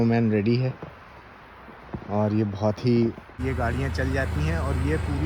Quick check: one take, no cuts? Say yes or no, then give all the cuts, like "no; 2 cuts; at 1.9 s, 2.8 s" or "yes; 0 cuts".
no; 1 cut; at 3.4 s